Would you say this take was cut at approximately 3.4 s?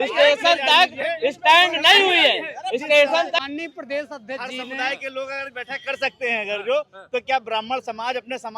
yes; 1 cut; at 3.4 s

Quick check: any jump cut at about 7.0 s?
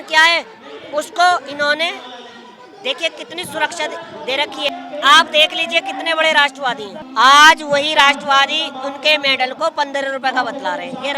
yes; 2 cuts; at 4.7 s, 7.0 s

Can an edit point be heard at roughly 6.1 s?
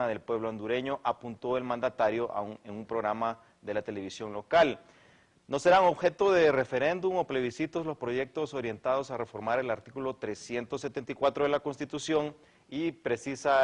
no; 1 cut; at 9.9 s

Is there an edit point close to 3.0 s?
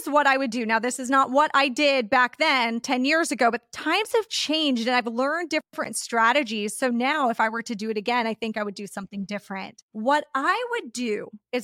no; 0 cuts

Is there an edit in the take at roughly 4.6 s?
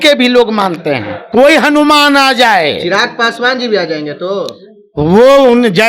no; 1 cut; at 1.1 s

